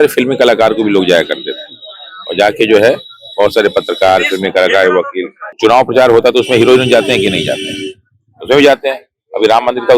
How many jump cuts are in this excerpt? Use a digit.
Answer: 1